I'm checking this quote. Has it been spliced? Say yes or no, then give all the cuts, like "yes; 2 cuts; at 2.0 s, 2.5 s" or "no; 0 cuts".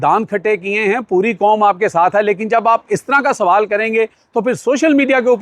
no; 0 cuts